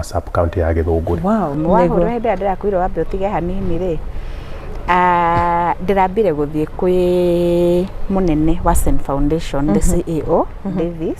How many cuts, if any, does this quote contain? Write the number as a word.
one